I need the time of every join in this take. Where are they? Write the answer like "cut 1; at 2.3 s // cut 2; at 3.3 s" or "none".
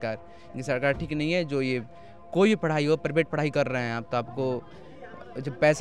none